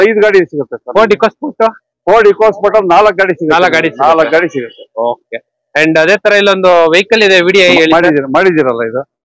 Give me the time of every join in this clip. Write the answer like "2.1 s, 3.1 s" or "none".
none